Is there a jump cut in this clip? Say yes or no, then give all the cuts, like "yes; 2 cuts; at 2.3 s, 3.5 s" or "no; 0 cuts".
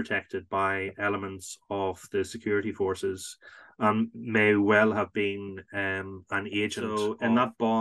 yes; 1 cut; at 6.9 s